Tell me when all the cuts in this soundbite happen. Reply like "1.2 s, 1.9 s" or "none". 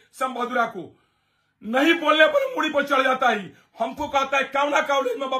none